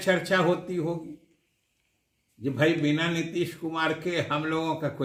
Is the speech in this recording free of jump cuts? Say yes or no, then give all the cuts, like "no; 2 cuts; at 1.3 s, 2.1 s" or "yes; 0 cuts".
yes; 0 cuts